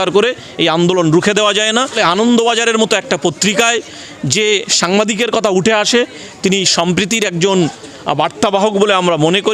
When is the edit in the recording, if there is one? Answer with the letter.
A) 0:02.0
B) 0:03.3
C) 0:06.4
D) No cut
A